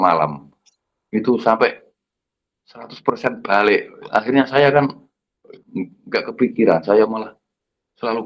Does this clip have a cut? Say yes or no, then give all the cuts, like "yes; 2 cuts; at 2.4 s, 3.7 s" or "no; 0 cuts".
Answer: no; 0 cuts